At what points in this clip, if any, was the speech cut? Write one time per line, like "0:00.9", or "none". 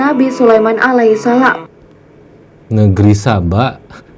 0:01.7

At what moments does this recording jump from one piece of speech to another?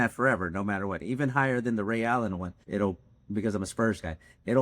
0:02.5

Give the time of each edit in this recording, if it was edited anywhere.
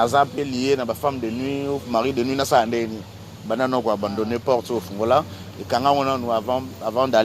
none

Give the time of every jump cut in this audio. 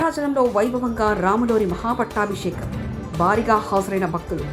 none

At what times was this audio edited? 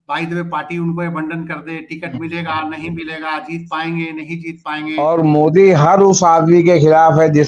0:05.0

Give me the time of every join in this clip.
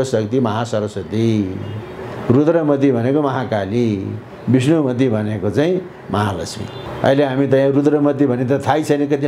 0:06.8

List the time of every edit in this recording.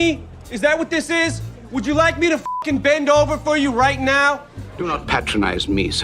0:01.5
0:04.6

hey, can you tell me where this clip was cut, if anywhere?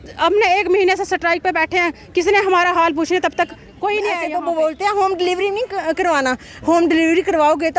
0:04.2

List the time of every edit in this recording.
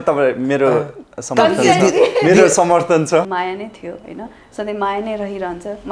0:03.3

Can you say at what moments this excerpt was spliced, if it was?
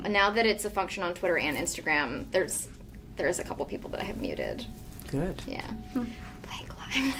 none

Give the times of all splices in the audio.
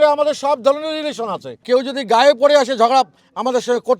0:01.5

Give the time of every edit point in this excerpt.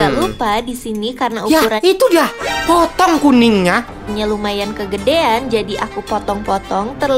0:03.9

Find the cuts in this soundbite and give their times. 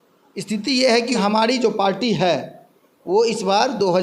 0:01.1

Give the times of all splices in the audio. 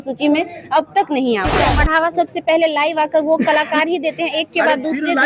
0:01.7

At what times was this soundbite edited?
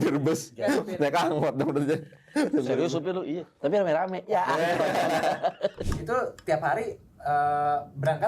0:05.8

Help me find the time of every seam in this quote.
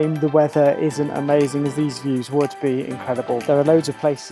0:03.4

